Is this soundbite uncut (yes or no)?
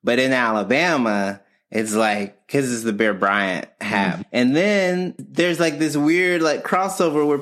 no